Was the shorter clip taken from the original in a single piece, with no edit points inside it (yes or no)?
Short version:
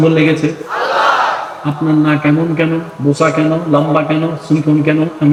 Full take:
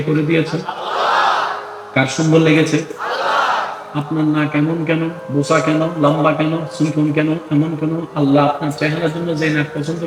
yes